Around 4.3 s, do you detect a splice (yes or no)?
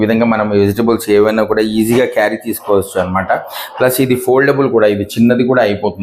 no